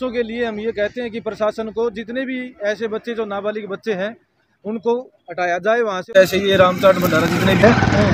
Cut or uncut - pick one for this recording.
cut